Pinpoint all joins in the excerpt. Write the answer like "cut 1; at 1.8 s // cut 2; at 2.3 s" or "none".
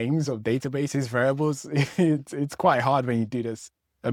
none